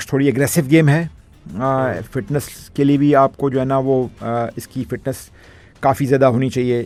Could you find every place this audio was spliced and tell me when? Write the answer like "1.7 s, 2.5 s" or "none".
none